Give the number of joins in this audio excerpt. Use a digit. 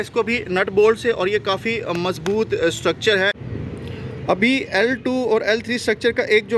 1